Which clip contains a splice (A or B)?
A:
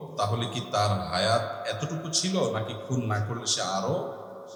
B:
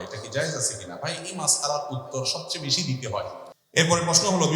B